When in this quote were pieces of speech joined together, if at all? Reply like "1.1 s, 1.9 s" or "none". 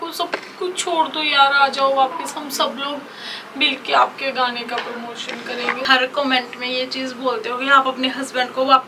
5.9 s